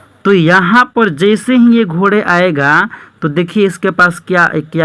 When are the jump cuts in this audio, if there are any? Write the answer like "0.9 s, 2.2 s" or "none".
none